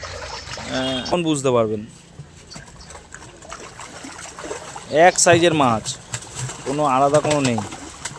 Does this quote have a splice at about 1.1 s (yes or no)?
yes